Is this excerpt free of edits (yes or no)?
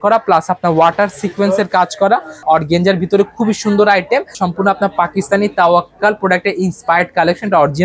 no